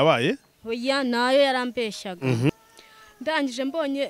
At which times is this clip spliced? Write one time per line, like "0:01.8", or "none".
0:02.5